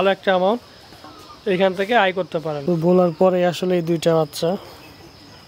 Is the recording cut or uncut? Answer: cut